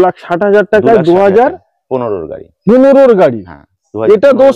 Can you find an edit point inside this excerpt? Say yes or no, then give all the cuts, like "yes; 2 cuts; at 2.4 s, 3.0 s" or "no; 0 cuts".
no; 0 cuts